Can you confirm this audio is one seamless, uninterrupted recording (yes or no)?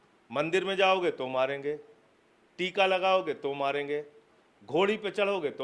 yes